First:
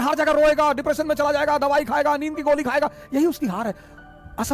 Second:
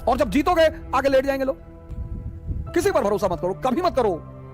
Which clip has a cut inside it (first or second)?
second